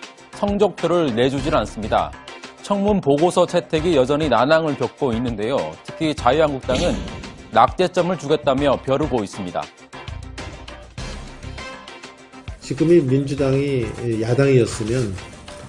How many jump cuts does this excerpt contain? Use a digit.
1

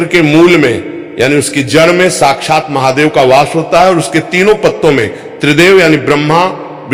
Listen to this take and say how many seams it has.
0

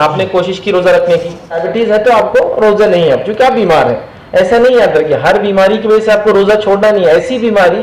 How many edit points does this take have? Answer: 1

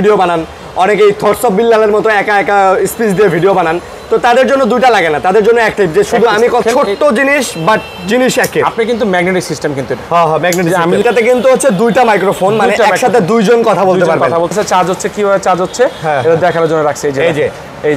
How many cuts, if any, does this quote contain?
3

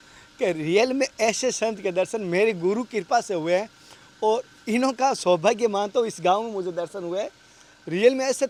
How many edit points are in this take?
0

